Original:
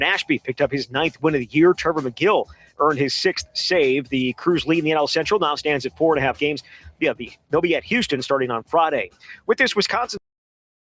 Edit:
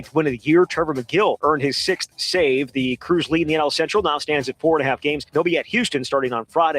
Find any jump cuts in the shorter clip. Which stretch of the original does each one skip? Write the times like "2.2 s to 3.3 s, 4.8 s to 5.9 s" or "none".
2.5 s to 2.7 s, 6.6 s to 7.4 s